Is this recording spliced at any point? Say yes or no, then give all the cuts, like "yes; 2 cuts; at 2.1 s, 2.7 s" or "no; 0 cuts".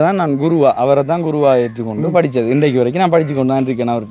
no; 0 cuts